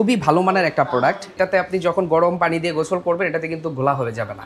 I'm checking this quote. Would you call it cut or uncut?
cut